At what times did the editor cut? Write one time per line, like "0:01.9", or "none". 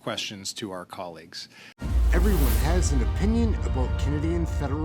0:01.8